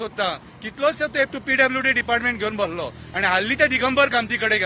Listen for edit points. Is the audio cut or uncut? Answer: uncut